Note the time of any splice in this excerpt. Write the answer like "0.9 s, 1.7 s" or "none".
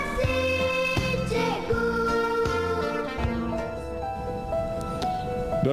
3.6 s